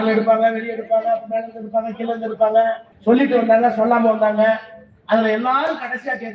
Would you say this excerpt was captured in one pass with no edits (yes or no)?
no